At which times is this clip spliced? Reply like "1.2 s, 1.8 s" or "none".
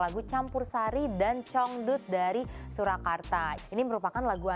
3.5 s